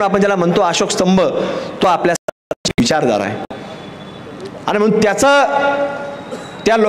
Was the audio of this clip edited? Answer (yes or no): no